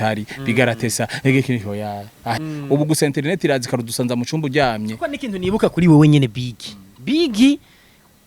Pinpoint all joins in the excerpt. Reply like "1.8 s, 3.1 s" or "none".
2.4 s

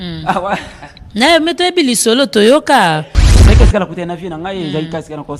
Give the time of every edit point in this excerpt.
3.5 s

